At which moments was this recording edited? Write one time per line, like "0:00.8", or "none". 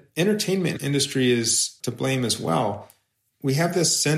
0:00.8
0:01.8